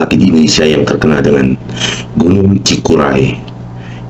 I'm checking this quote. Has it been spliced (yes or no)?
no